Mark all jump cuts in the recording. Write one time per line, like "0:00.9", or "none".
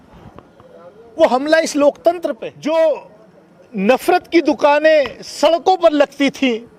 0:02.5